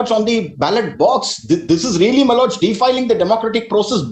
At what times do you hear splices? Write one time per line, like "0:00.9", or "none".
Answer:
none